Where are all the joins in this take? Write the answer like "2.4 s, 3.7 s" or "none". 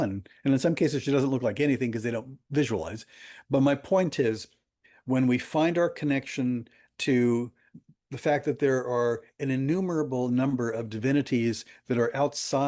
none